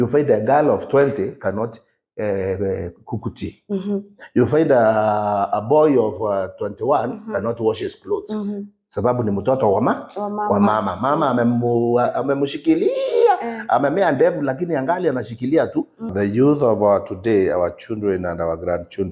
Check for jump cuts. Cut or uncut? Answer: cut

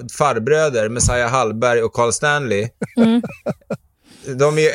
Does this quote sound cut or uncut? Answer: uncut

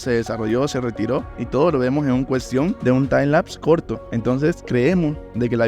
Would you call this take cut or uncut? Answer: cut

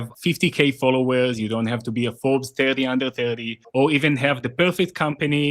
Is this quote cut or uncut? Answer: cut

